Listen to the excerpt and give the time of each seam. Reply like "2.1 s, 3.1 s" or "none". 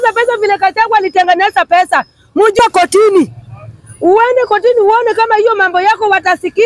2.6 s